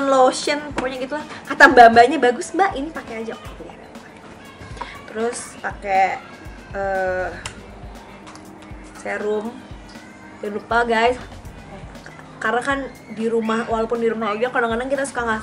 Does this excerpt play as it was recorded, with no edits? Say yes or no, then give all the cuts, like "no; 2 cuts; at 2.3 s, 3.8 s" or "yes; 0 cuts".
yes; 0 cuts